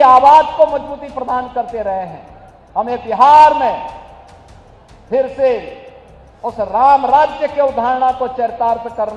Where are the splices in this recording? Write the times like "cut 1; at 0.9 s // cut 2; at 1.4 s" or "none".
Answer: none